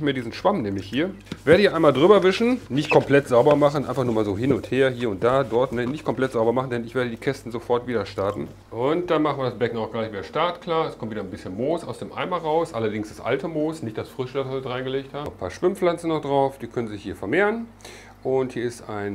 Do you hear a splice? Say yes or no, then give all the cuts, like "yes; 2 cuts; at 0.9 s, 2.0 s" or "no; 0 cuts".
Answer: yes; 3 cuts; at 1.2 s, 8.6 s, 15.3 s